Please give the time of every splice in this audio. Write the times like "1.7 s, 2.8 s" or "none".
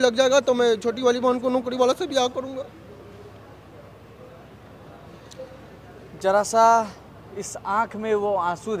none